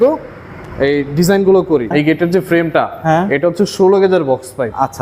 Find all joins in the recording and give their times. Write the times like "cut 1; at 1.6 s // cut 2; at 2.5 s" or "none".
cut 1; at 1.9 s